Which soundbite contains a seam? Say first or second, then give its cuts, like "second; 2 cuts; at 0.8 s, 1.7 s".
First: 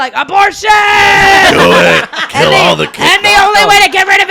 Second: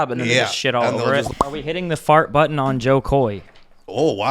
second; 1 cut; at 1.3 s